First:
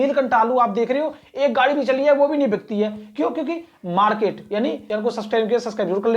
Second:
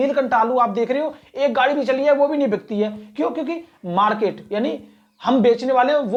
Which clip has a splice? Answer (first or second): first